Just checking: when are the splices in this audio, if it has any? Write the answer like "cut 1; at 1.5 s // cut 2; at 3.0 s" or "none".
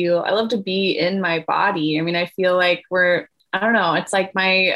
cut 1; at 3.4 s